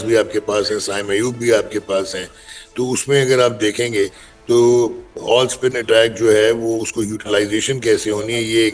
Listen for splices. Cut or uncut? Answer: uncut